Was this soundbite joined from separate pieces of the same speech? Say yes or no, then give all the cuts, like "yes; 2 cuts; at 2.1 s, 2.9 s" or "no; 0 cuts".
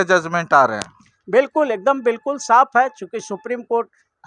no; 0 cuts